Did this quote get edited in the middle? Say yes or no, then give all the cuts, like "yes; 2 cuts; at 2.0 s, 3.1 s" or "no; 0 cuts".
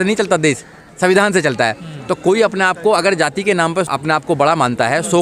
no; 0 cuts